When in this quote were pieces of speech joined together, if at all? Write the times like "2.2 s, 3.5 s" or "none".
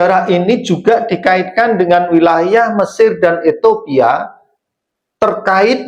none